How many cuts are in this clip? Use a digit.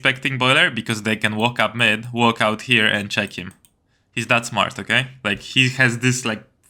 0